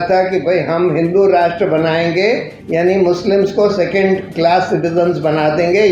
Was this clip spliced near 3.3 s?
no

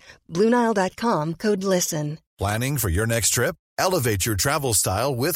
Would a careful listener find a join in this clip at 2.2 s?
yes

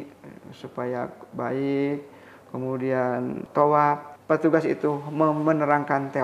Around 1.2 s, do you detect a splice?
no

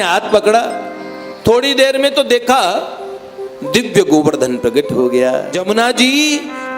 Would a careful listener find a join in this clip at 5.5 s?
yes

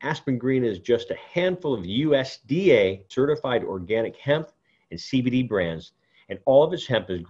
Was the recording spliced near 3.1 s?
yes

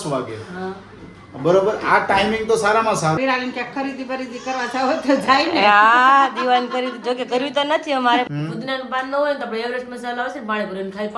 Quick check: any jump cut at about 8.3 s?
yes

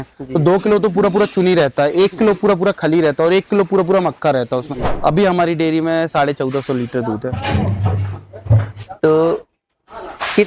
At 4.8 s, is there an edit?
yes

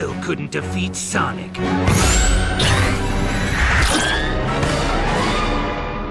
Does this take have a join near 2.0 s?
no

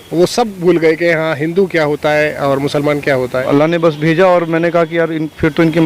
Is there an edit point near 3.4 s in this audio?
yes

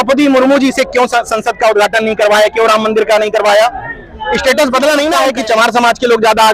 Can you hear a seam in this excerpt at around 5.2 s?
yes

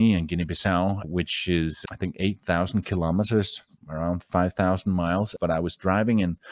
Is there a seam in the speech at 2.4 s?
no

